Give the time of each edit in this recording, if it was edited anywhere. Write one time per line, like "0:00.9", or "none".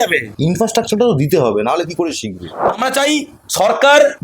0:02.6